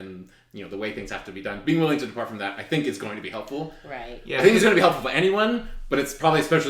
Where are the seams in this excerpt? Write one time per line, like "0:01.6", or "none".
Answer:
none